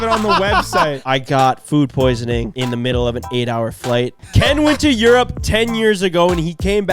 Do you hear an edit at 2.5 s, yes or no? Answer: yes